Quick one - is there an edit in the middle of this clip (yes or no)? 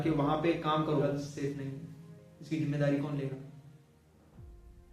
yes